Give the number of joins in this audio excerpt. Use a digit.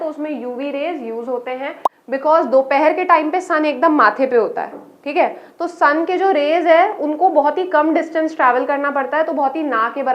1